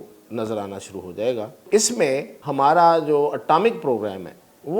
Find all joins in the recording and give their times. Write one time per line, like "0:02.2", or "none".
0:01.6
0:02.4